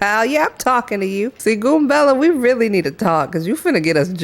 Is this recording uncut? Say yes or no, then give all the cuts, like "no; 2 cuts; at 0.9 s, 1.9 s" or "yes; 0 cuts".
no; 1 cut; at 1.4 s